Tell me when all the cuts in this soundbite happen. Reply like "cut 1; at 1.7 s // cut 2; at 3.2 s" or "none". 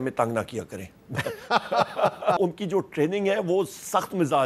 cut 1; at 2.4 s